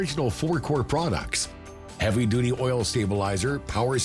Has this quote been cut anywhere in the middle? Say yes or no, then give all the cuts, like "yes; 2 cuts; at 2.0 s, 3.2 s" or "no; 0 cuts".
no; 0 cuts